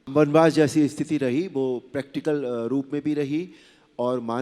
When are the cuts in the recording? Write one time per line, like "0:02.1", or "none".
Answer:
none